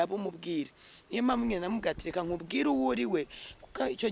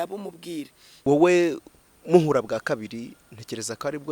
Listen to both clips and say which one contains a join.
second; 1 cut; at 1.1 s

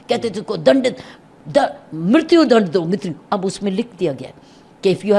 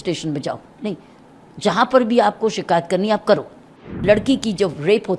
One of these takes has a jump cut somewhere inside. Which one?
second; 1 cut; at 3.9 s

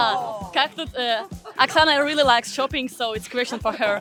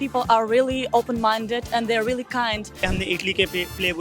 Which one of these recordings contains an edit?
second; 1 cut; at 2.8 s

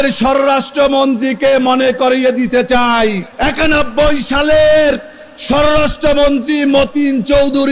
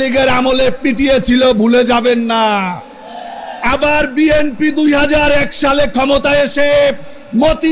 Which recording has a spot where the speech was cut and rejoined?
first; 1 cut; at 3.3 s

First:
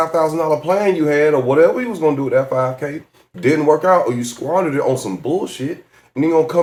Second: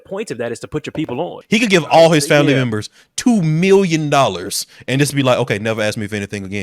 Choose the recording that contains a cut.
second; 1 cut; at 1.4 s

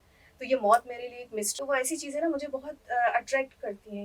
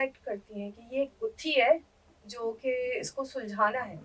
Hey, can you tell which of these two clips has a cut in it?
first; 1 cut; at 1.6 s

